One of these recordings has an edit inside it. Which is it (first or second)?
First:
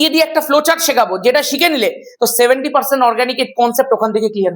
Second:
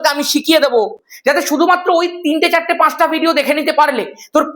second